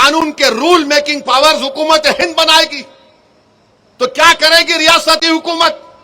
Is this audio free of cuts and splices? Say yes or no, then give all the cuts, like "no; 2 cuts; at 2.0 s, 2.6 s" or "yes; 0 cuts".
yes; 0 cuts